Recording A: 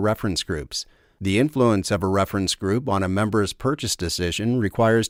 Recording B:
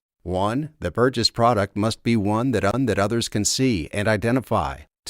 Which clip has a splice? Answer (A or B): B